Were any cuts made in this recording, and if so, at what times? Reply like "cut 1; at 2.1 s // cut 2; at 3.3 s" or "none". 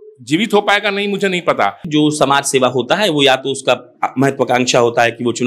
cut 1; at 1.8 s